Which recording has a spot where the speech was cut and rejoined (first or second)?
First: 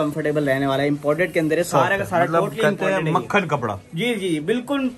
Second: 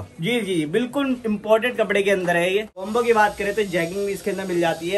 second